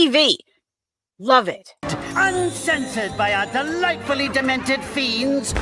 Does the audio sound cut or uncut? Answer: uncut